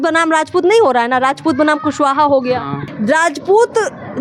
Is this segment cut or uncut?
cut